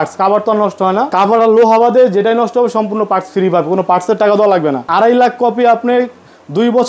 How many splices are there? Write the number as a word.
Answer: two